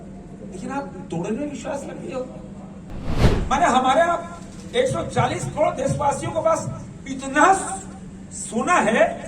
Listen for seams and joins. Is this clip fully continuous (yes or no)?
no